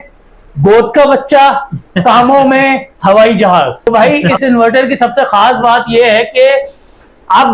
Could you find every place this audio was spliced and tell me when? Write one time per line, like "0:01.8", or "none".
0:03.9